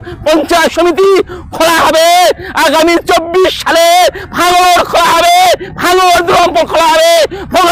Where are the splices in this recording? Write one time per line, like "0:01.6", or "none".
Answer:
none